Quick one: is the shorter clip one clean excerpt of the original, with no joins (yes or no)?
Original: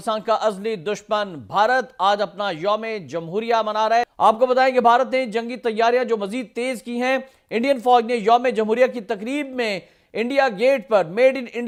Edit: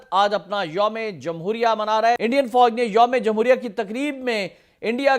no